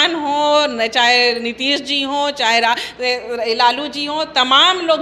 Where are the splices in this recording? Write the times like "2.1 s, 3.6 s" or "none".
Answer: none